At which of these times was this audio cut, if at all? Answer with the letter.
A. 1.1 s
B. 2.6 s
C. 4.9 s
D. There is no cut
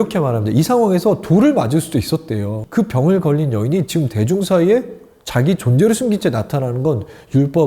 B